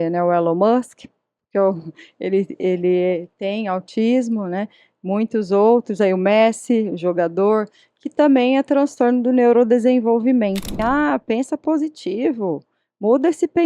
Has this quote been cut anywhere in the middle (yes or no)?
yes